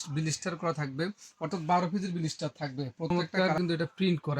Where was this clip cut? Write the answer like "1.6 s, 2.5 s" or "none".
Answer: 3.1 s

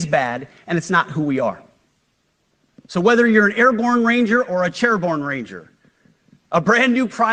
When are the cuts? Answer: none

